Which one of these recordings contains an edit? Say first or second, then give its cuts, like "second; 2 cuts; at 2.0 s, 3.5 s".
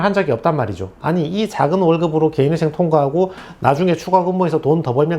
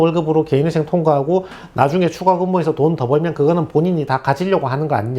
first; 1 cut; at 0.9 s